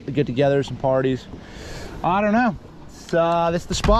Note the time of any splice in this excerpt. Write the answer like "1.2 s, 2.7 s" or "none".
none